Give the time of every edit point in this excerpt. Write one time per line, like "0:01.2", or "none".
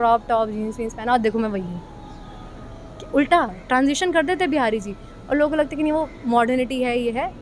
none